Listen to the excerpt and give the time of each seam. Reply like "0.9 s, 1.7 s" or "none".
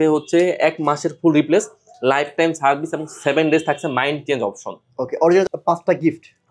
5.5 s